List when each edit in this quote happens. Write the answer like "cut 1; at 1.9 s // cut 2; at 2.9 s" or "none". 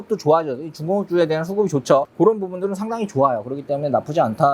cut 1; at 2.1 s